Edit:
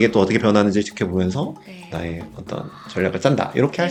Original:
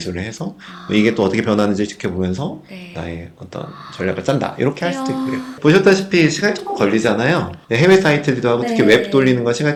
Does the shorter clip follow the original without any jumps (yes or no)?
yes